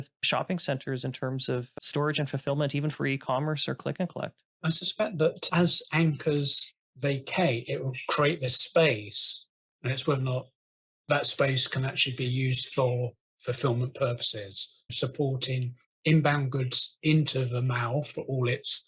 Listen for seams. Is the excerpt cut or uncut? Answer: uncut